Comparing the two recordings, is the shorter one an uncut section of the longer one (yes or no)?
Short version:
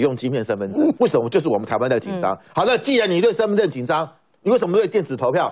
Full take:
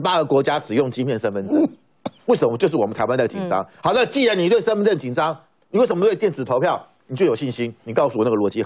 no